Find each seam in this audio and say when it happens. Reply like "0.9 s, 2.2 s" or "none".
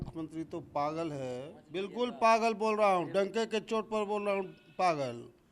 1.6 s